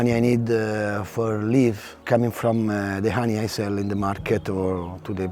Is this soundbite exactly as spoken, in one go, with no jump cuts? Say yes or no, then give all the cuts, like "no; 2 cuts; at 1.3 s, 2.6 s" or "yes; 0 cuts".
no; 1 cut; at 2.0 s